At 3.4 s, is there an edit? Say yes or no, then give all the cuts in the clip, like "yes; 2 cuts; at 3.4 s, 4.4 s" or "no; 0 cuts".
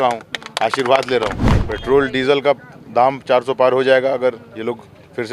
no; 1 cut; at 1.5 s